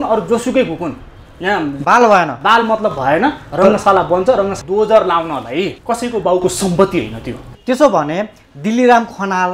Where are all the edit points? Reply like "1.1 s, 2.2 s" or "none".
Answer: 4.6 s, 7.6 s